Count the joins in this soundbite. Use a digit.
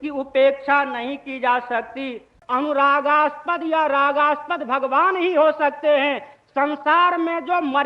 1